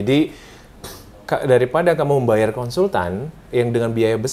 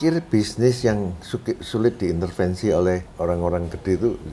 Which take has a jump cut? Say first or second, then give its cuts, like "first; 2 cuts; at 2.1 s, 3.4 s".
second; 1 cut; at 3.1 s